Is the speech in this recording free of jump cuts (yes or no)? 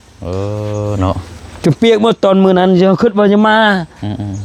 yes